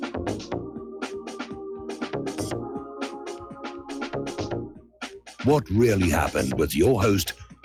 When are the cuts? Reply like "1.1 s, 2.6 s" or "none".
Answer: none